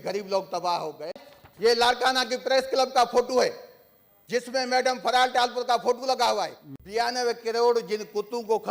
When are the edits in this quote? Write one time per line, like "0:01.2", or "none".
0:01.2
0:06.6